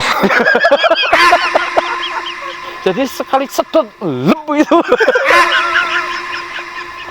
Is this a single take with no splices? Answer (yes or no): no